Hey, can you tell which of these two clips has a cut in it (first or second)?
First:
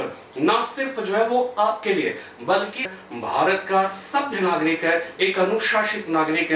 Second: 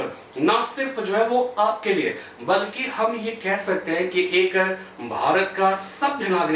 first